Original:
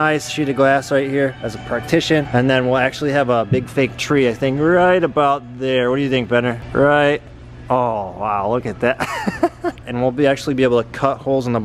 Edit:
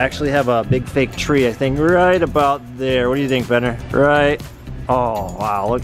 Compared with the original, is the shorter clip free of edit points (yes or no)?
yes